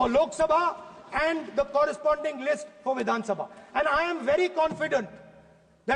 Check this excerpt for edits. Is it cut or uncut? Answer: uncut